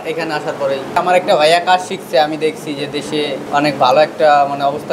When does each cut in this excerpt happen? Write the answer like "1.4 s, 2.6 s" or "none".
1.0 s, 3.5 s